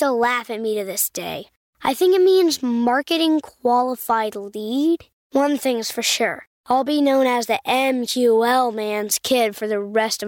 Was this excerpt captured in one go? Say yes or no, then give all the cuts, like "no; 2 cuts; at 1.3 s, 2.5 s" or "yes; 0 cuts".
yes; 0 cuts